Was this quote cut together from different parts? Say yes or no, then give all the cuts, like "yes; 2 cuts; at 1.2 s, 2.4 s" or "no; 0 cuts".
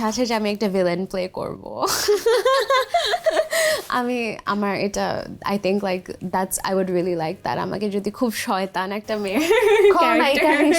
no; 0 cuts